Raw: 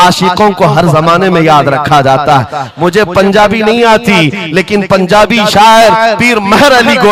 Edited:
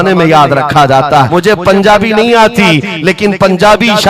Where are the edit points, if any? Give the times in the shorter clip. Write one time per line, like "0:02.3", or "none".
0:01.3